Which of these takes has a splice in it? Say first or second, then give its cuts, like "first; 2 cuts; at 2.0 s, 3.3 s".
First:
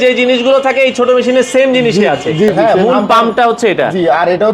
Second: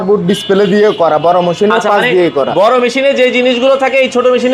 first; 1 cut; at 2.5 s